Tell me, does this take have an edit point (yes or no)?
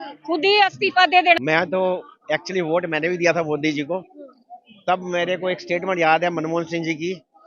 yes